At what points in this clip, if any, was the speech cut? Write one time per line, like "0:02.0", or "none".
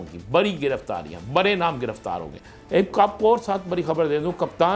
0:02.3